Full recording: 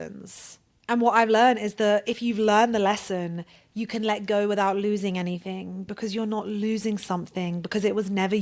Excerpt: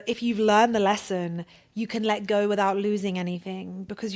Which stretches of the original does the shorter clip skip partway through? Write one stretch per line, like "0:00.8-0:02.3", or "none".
none